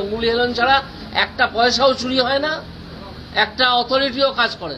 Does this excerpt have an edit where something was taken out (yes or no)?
no